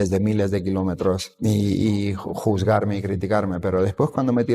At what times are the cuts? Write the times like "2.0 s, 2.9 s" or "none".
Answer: 1.3 s